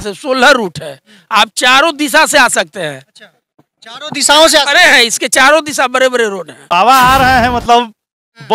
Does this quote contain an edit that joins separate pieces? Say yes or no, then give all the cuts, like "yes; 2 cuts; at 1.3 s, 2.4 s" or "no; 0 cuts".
yes; 1 cut; at 6.6 s